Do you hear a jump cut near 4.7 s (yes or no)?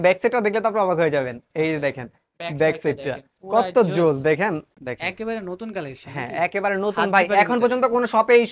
yes